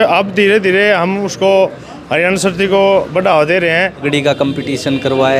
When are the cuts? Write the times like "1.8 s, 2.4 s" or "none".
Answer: 4.0 s